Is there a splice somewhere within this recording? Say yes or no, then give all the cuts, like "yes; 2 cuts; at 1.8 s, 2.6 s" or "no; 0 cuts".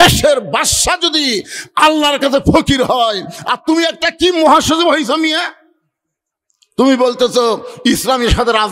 no; 0 cuts